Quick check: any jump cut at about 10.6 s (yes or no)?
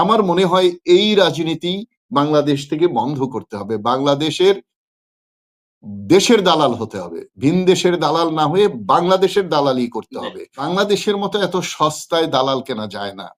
yes